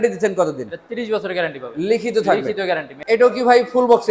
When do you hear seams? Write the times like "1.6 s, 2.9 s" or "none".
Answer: 2.9 s